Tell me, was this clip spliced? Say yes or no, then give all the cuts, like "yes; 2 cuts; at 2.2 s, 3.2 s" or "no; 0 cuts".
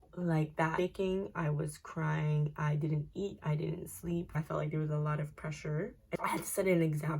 yes; 3 cuts; at 0.8 s, 4.3 s, 6.2 s